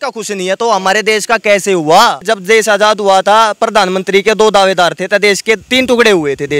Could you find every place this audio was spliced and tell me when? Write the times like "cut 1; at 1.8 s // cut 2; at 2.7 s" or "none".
cut 1; at 2.3 s // cut 2; at 5.6 s